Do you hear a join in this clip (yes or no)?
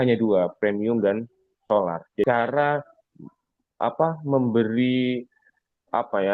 yes